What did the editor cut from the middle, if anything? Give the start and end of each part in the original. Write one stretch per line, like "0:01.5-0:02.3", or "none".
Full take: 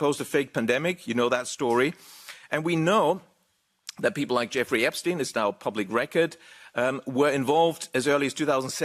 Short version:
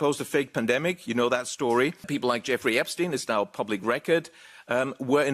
0:02.1-0:04.1

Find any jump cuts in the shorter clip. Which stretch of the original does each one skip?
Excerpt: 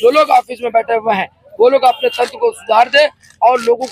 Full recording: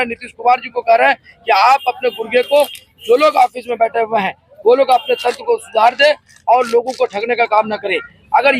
none

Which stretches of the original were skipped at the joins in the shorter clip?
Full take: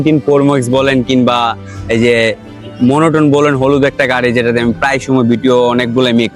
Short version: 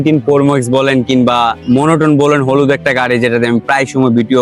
0:01.6-0:02.7

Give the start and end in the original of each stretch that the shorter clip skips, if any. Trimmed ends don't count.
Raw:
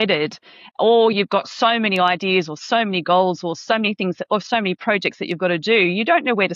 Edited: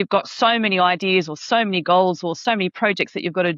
0:03.6-0:04.4

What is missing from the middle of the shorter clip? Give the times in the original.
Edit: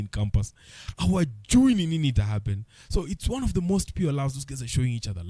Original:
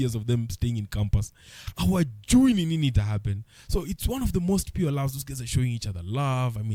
none

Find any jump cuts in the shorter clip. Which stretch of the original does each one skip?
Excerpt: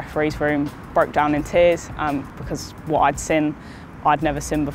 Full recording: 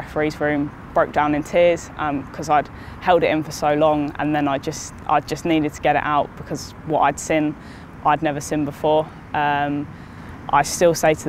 0:02.4-0:06.4

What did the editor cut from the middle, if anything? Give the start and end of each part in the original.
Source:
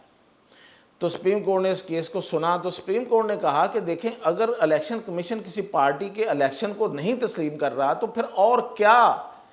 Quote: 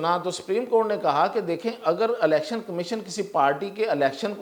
none

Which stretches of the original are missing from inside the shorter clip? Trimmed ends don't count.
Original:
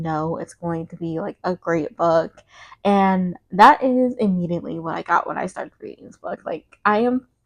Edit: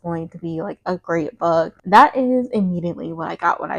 0:02.4-0:03.4

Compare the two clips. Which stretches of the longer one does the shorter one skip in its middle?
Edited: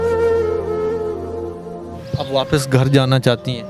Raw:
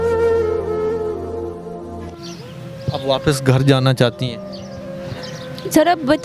0:02.0-0:02.7

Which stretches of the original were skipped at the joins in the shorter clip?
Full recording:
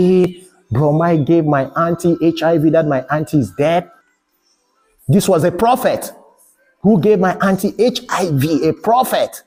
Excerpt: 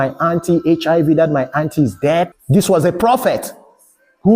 0:03.9-0:05.0

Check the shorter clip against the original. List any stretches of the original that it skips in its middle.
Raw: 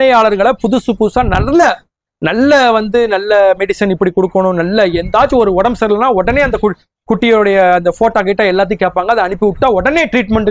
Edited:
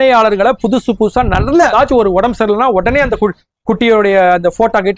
0:01.7-0:05.1

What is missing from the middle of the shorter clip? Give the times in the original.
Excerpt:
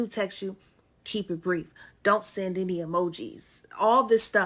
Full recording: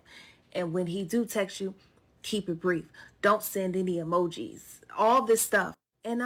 none

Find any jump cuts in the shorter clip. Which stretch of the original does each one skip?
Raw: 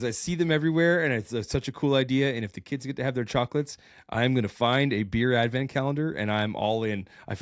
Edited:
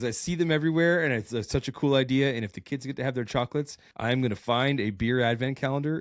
0:03.8-0:04.0

